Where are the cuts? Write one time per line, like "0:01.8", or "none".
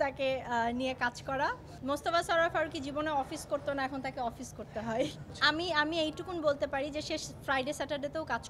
0:01.7
0:05.3